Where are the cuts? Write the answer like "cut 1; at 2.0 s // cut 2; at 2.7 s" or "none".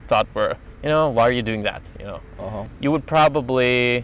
cut 1; at 2.7 s